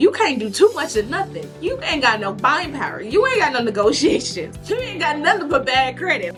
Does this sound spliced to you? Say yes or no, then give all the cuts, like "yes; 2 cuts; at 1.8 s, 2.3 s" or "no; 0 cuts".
no; 0 cuts